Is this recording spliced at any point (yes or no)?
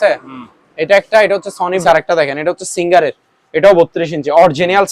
yes